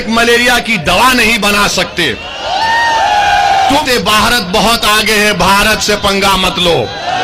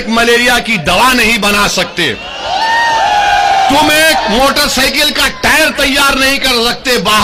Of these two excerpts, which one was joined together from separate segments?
first; 1 cut; at 3.8 s

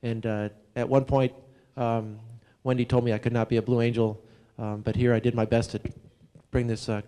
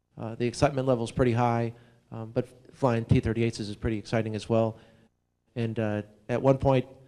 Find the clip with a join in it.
first; 1 cut; at 3.4 s

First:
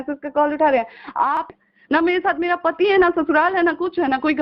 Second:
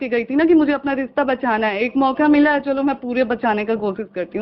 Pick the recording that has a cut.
first; 1 cut; at 1.5 s

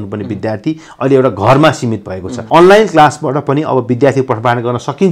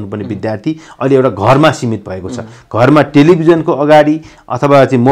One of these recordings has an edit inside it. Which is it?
first; 1 cut; at 2.4 s

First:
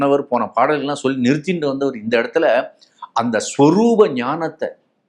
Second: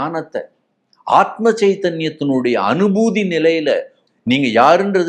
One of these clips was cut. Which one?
second; 1 cut; at 4.0 s

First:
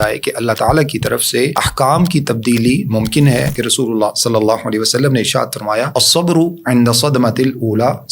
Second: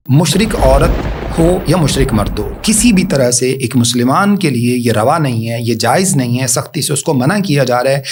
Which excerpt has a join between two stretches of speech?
first; 3 cuts; at 1.6 s, 3.6 s, 5.9 s

